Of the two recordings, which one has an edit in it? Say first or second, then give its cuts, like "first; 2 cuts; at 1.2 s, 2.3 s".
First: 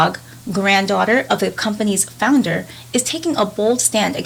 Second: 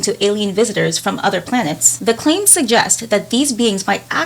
second; 1 cut; at 1.9 s